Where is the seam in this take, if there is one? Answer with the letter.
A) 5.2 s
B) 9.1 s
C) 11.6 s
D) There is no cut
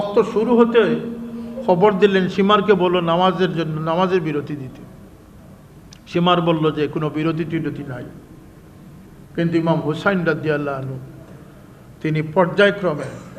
D